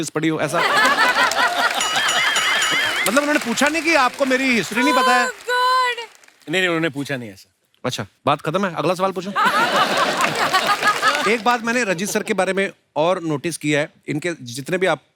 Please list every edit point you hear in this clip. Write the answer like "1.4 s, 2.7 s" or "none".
11.2 s